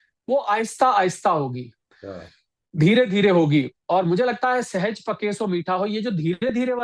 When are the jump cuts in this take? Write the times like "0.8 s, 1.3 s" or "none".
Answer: none